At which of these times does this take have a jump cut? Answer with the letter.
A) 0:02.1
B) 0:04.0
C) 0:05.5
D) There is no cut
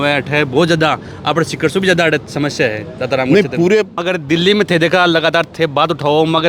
B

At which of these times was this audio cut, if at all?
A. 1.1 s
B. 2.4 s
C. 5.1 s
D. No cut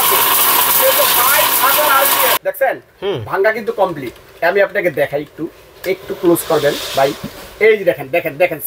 B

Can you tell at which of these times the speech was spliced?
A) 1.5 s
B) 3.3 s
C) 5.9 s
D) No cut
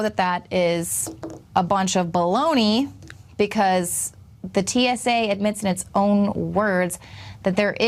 D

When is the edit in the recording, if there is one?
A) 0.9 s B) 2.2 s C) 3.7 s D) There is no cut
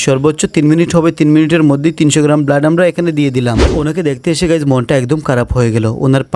C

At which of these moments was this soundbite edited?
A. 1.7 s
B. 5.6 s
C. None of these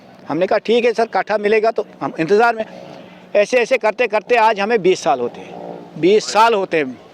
C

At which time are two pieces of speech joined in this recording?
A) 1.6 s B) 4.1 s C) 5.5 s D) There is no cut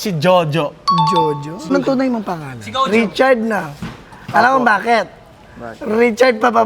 A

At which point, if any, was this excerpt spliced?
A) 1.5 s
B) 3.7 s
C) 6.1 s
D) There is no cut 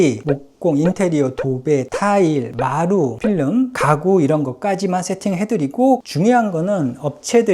C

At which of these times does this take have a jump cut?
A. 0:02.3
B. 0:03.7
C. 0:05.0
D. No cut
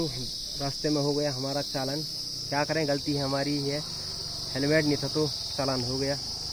D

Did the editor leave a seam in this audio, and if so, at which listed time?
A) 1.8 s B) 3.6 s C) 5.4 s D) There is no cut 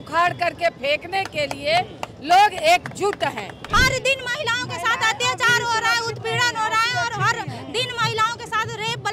B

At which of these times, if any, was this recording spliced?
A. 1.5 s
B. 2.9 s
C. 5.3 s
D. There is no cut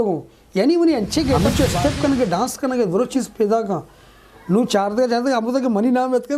A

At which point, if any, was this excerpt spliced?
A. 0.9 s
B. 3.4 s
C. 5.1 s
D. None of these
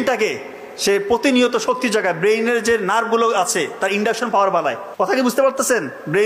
C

